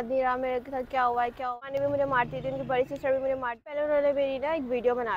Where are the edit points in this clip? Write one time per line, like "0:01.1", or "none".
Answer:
0:01.6
0:03.8